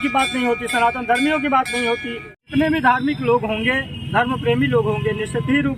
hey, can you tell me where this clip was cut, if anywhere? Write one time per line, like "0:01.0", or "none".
0:02.4